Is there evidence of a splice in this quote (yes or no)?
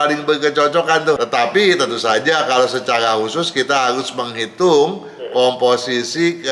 yes